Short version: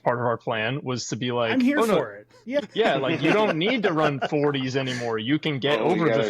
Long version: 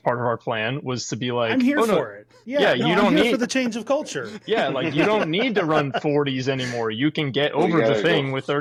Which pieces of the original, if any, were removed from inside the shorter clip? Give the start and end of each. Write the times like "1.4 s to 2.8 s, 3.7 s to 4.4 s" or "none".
2.6 s to 4.3 s